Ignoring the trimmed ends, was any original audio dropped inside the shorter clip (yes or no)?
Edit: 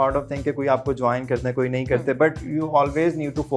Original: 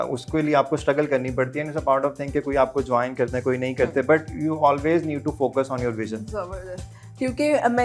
no